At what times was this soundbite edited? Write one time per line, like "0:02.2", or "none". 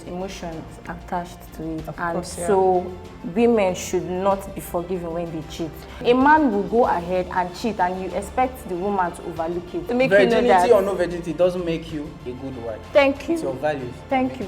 0:06.0
0:09.9

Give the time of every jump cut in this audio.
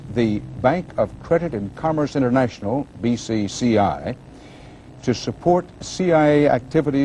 0:04.8

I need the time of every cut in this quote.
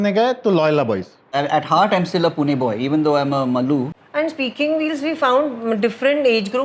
0:01.3
0:04.0

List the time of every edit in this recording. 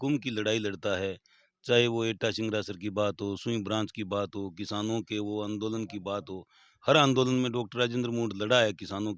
none

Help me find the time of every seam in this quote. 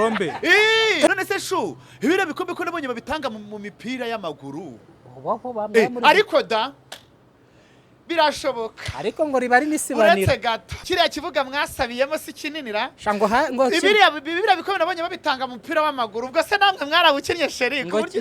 0:01.1
0:10.7

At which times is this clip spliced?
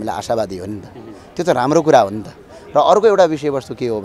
none

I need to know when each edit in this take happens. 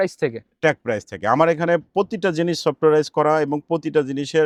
none

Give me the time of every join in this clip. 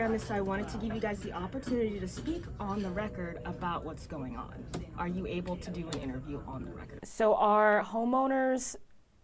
0:07.1

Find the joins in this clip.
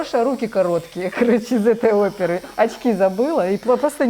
none

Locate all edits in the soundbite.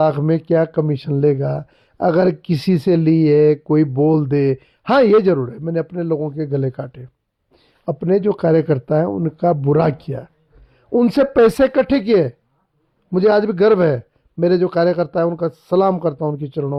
none

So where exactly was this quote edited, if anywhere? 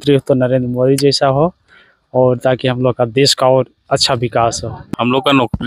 0:04.7

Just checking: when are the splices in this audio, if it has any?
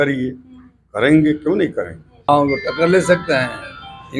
0:02.3

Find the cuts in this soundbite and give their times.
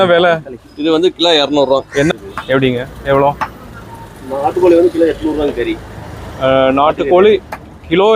0:02.1

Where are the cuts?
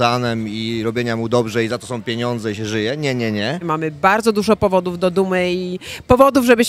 0:03.7

